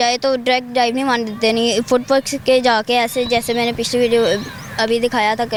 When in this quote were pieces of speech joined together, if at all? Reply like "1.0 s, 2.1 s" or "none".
none

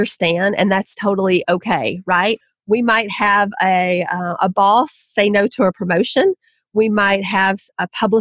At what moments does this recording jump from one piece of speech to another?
none

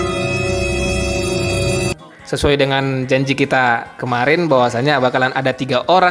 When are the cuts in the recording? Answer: 1.9 s

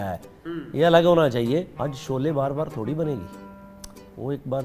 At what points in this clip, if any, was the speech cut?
1.7 s

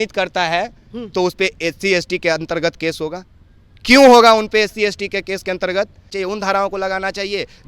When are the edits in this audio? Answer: 6.1 s

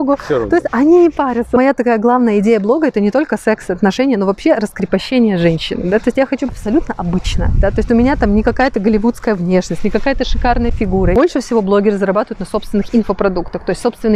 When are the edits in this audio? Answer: 1.6 s, 6.5 s, 11.1 s

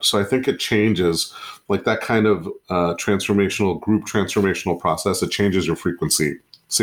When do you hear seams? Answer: none

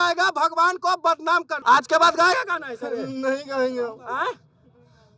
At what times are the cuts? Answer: 1.5 s

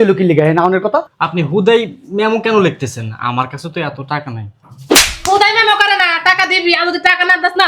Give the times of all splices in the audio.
1.1 s

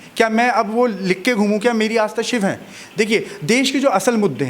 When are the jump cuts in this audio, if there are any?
none

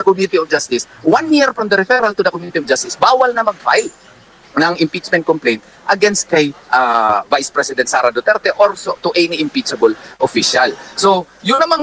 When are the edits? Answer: 5.0 s

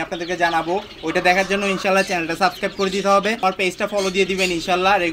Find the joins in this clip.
3.4 s

